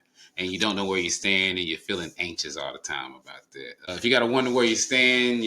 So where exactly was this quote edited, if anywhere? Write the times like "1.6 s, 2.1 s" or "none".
3.9 s

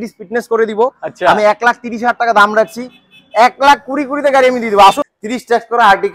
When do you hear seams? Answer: 5.0 s

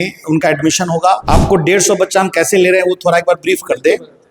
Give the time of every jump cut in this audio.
1.2 s

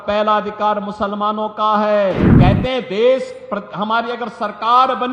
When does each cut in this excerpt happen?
2.3 s

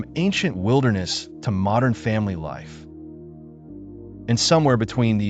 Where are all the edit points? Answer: none

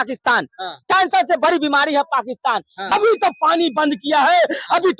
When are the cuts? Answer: 2.8 s

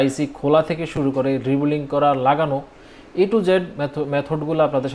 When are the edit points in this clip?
none

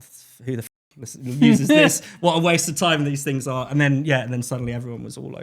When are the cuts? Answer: none

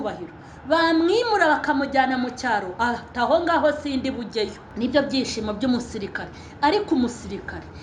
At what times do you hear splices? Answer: 4.6 s

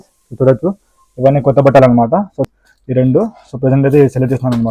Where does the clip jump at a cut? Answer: 2.4 s

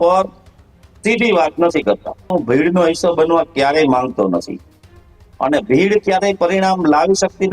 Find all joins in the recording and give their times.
2.3 s

